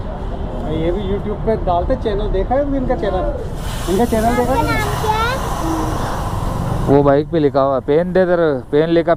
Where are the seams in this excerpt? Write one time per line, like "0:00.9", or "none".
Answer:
none